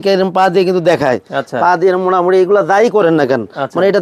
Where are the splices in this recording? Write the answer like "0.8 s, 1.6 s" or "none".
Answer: none